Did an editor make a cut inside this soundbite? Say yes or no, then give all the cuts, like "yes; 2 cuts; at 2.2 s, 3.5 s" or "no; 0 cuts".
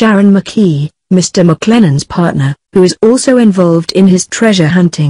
no; 0 cuts